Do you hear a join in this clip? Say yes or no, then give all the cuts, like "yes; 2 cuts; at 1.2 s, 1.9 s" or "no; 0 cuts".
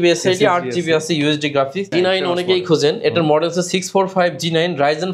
yes; 1 cut; at 1.9 s